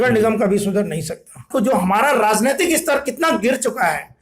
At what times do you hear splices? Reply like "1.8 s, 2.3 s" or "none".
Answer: 1.5 s